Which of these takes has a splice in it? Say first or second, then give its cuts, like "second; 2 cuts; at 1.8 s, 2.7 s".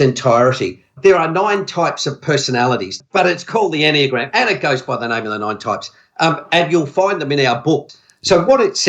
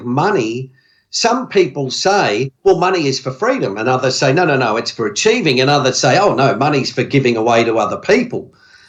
first; 3 cuts; at 0.9 s, 3.0 s, 7.9 s